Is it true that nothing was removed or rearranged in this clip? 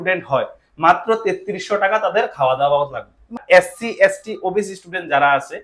no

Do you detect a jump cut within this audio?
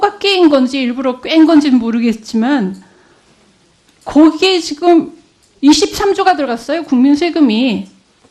yes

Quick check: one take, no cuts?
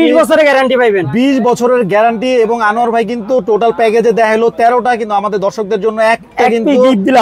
yes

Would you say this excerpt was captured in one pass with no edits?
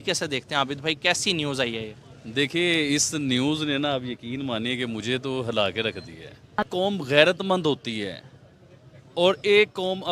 no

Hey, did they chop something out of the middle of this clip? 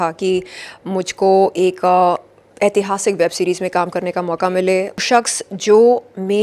yes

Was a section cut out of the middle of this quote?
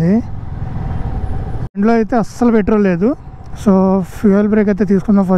no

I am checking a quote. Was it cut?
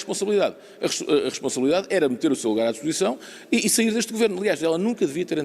no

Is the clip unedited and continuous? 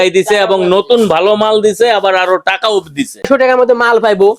no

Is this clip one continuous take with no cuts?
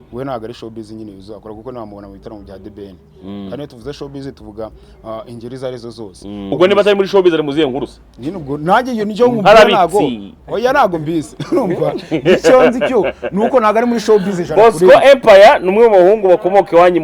no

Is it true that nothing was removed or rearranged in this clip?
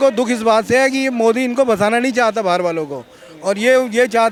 yes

